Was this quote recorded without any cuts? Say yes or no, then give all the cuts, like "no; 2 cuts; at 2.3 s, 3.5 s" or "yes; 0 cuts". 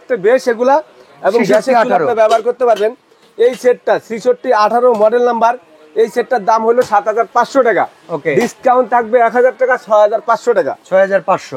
yes; 0 cuts